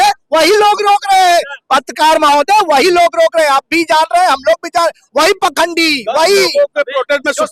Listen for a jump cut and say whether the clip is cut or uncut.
uncut